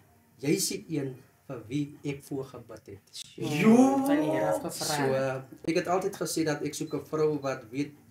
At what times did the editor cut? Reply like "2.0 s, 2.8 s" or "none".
none